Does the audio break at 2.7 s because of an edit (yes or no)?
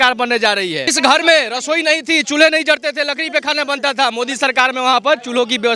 no